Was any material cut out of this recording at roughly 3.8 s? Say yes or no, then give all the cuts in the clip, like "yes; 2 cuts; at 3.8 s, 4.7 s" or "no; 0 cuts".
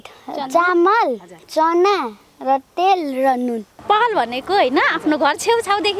yes; 1 cut; at 3.8 s